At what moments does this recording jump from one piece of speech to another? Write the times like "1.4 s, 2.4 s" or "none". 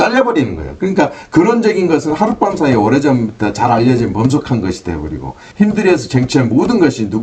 none